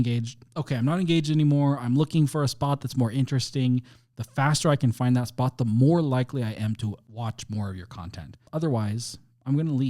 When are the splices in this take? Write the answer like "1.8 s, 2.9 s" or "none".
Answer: 7.1 s, 8.4 s